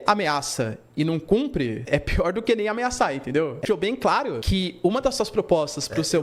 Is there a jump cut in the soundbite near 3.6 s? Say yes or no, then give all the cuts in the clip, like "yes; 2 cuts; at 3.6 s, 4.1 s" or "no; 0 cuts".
yes; 1 cut; at 3.6 s